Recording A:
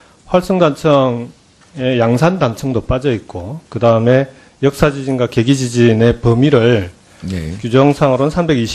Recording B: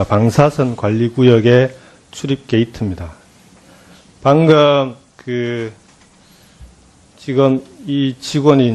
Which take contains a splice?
A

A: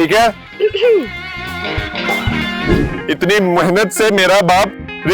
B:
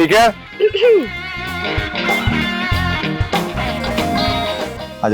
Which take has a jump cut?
A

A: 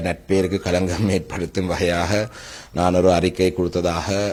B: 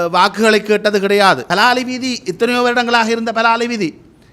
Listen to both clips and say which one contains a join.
B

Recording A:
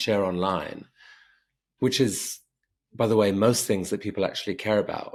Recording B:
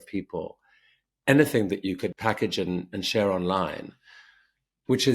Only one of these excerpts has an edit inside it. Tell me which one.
B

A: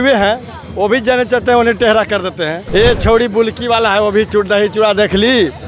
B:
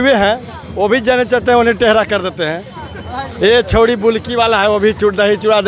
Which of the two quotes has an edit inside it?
A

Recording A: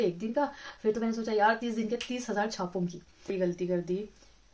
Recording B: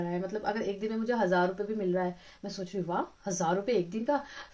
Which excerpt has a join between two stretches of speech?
A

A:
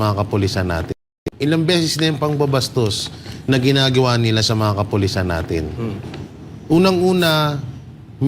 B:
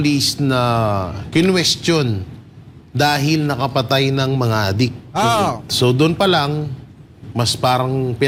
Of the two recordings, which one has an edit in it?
A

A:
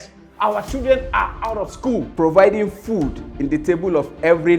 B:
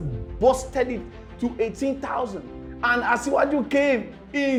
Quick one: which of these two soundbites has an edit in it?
A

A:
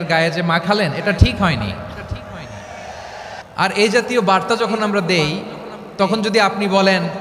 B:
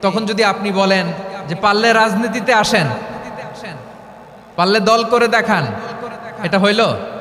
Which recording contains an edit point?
A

